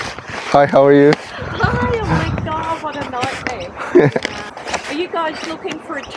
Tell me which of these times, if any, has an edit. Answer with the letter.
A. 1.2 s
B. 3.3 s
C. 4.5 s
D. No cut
C